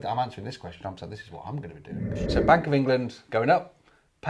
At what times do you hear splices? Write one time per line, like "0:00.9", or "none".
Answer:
0:02.2